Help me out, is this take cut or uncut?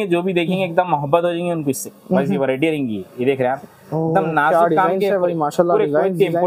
uncut